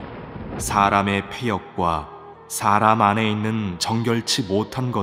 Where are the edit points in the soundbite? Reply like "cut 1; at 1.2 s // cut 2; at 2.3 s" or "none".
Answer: none

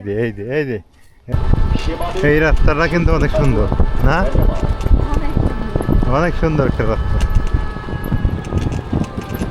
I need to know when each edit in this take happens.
cut 1; at 1.1 s

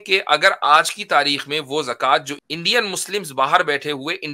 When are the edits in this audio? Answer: cut 1; at 2.4 s

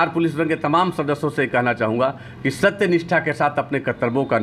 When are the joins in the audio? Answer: none

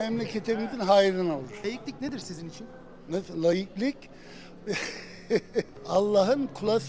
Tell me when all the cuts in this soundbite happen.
cut 1; at 1.6 s // cut 2; at 5.7 s

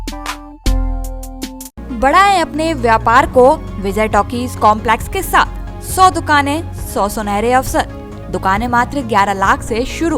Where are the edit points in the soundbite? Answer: none

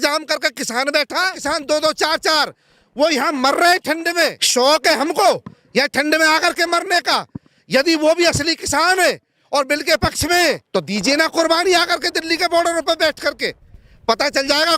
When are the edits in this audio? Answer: cut 1; at 1.4 s // cut 2; at 4.4 s // cut 3; at 10.6 s

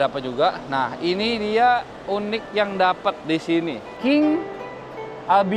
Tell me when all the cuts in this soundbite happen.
cut 1; at 3.9 s

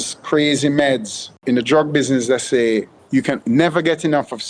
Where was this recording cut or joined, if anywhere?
cut 1; at 1.4 s // cut 2; at 3.3 s

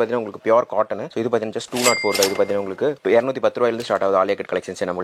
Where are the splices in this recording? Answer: cut 1; at 3.0 s

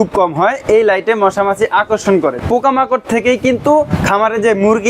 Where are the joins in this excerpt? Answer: cut 1; at 2.4 s

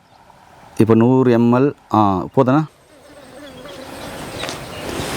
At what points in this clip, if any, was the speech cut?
cut 1; at 2.7 s

